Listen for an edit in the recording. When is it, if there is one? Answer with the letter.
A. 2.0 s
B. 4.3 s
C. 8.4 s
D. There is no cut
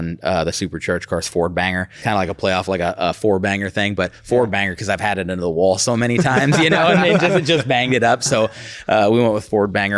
A